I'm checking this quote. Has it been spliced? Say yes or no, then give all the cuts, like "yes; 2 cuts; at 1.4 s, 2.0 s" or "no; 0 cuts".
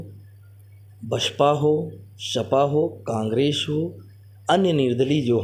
no; 0 cuts